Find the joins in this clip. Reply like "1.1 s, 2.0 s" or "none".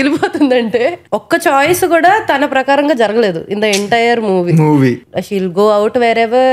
1.1 s, 5.0 s